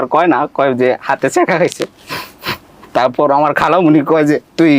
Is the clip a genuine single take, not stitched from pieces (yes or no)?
yes